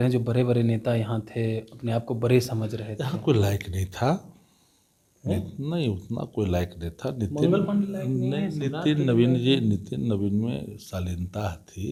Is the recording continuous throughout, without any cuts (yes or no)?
yes